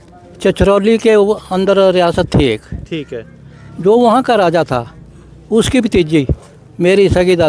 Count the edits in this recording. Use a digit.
0